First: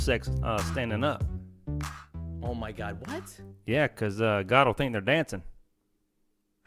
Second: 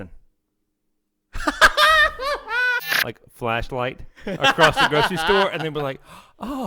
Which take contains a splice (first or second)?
second